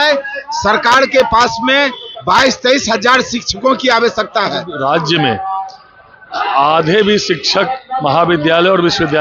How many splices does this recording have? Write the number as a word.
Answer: one